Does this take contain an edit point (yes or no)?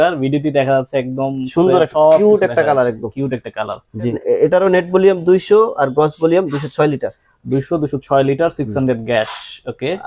no